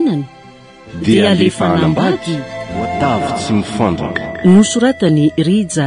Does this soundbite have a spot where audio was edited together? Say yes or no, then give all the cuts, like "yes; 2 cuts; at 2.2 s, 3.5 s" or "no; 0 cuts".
yes; 1 cut; at 3.0 s